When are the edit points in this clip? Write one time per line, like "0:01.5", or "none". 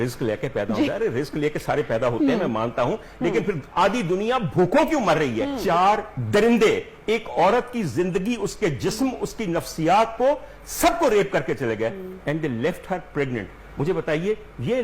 0:05.6